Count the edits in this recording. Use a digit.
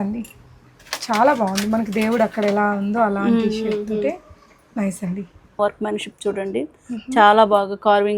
1